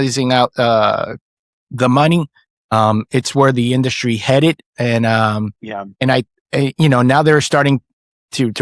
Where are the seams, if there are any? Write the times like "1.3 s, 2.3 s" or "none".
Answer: none